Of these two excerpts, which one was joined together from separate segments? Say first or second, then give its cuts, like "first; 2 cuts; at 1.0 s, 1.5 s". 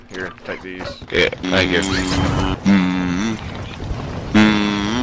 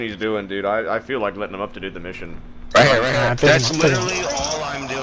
first; 2 cuts; at 1.4 s, 2.6 s